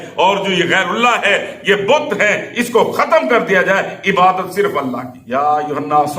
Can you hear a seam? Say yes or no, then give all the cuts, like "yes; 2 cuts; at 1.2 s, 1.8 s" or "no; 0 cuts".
yes; 1 cut; at 5.1 s